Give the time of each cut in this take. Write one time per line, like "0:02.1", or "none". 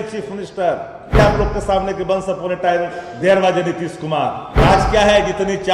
0:01.2
0:04.5

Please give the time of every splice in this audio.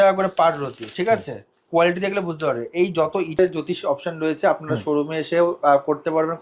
0:03.4

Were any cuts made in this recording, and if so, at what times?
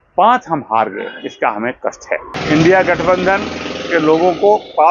0:02.3

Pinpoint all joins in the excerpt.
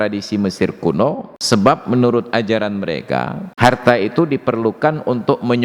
0:01.3
0:03.4

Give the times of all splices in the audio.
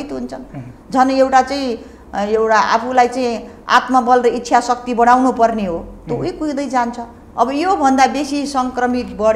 0:07.2

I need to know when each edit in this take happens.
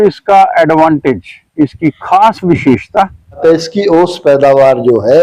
0:03.4

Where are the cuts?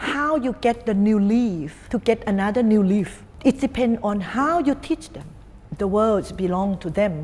0:01.8
0:03.2
0:05.7

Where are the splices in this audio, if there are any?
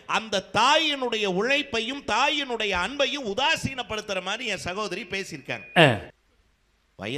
0:06.0

